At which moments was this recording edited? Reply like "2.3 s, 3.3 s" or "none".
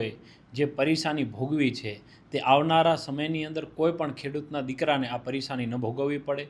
none